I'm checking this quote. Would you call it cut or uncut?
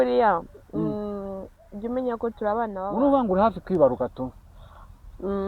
cut